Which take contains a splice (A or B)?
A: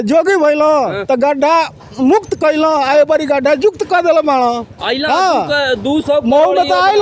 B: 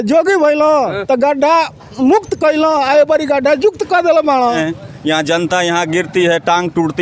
B